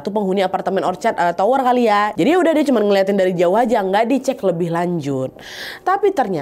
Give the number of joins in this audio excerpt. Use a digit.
1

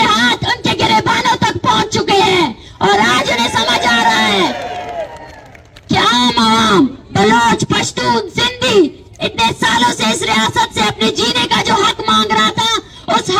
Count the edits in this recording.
0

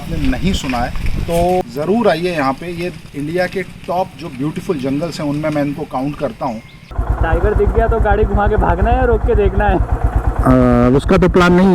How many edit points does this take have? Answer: 2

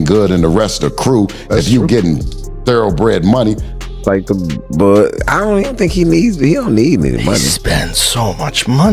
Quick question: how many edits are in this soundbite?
1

